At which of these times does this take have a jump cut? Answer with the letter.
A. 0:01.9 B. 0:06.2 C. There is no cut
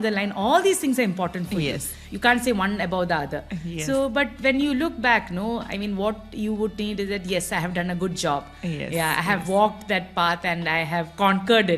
A